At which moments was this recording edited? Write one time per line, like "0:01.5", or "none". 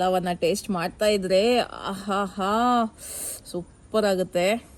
none